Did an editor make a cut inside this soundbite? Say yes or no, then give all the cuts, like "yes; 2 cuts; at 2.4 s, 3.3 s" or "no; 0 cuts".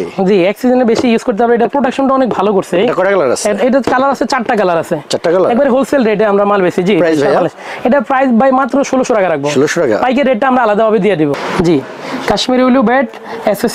yes; 1 cut; at 11.3 s